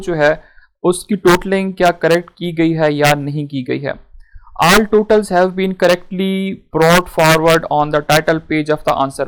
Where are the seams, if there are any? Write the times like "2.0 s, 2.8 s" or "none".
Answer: none